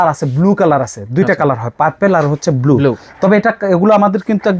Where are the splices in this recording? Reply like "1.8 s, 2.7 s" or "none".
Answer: none